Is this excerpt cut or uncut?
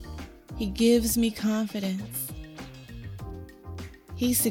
cut